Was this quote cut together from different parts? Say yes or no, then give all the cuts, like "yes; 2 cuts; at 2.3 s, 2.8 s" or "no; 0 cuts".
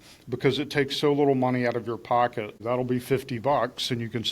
yes; 1 cut; at 2.6 s